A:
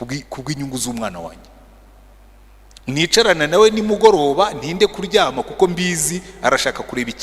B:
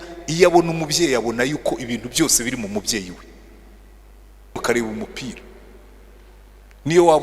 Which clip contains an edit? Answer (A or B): B